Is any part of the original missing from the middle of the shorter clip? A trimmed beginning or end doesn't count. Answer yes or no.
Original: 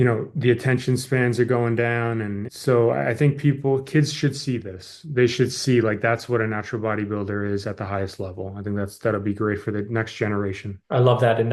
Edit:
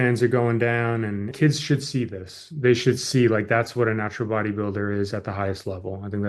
yes